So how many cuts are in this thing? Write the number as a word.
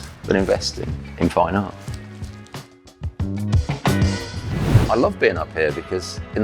one